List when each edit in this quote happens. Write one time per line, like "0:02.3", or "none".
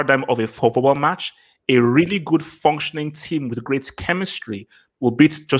none